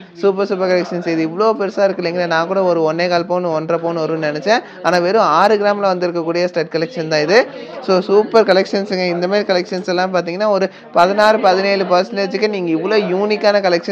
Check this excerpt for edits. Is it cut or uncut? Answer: uncut